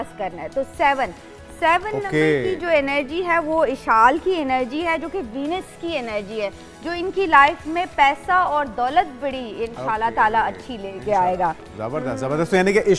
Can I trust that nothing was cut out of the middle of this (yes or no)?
yes